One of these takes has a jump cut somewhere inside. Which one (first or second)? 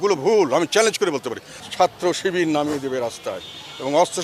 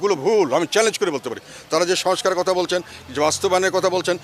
first